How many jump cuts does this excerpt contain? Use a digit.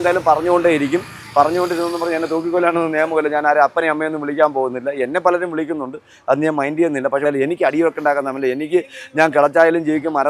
1